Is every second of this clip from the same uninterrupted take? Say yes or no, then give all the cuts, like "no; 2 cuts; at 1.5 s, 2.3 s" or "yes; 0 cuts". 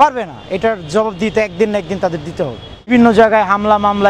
no; 1 cut; at 2.9 s